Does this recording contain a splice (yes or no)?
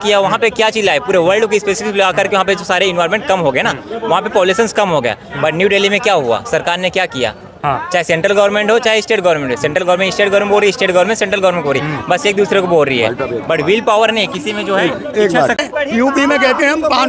yes